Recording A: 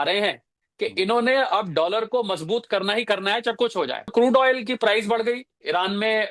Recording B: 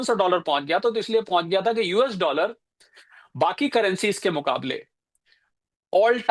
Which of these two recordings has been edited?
A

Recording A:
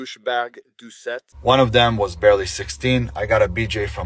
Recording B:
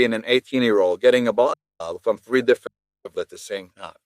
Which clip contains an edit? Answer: A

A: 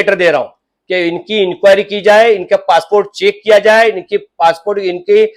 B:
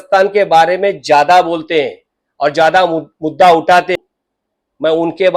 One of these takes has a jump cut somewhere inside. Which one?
B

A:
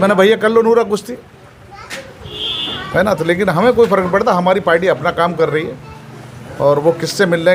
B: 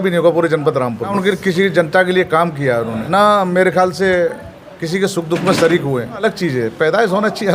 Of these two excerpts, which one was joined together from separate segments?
B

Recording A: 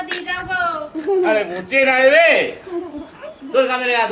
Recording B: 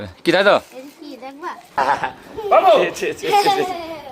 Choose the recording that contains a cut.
B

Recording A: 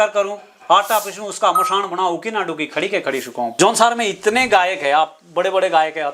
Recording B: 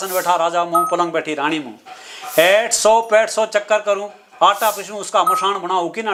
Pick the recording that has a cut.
A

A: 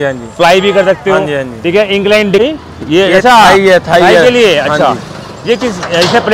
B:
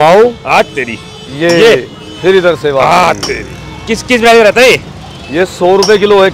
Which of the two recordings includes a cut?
A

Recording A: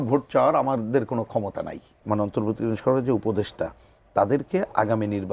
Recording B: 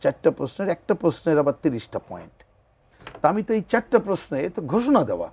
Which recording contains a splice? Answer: A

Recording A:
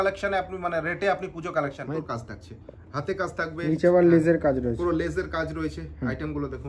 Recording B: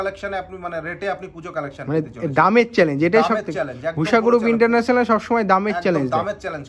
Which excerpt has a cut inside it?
A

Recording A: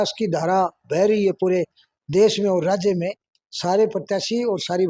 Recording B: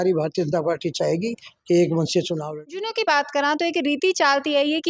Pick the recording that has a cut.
B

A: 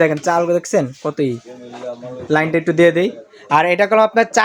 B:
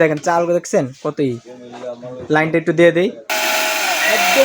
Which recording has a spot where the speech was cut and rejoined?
B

